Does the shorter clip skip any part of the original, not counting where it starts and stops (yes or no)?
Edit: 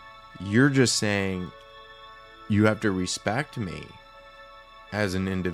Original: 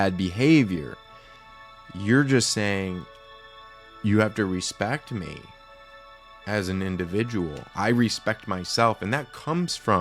no